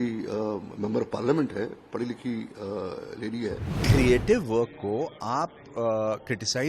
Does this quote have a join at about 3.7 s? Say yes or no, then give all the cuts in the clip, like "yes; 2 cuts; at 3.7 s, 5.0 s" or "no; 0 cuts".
yes; 1 cut; at 3.7 s